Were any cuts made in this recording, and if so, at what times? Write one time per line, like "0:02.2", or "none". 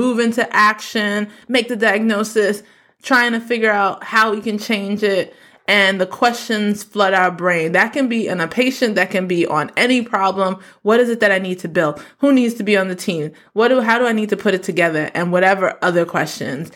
none